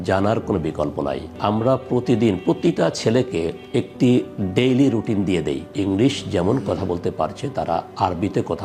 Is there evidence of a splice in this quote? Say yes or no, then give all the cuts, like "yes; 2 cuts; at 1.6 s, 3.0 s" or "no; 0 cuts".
yes; 2 cuts; at 1.3 s, 5.7 s